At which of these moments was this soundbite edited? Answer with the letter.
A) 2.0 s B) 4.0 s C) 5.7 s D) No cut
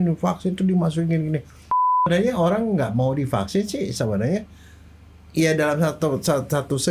A